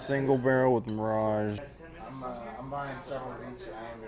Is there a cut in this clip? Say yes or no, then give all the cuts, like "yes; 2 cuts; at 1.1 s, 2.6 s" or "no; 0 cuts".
yes; 1 cut; at 1.7 s